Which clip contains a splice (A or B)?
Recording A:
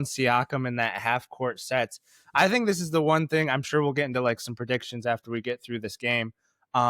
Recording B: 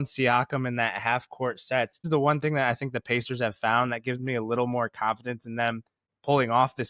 B